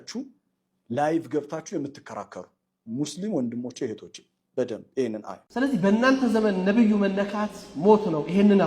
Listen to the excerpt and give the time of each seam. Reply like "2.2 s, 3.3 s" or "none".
5.5 s